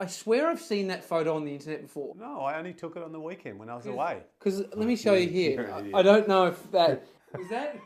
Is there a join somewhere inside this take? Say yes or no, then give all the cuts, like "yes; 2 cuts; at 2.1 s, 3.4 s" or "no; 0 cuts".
yes; 1 cut; at 2.2 s